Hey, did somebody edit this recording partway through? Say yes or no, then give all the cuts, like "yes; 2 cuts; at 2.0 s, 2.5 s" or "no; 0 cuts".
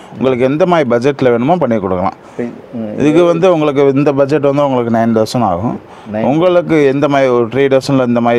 no; 0 cuts